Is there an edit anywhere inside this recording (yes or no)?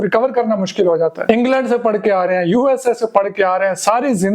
yes